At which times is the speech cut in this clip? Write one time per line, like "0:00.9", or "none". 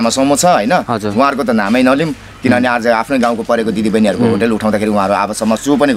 none